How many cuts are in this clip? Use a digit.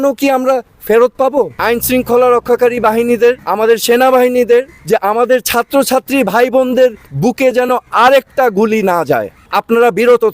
4